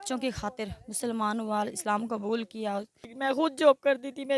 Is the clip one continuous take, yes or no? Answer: no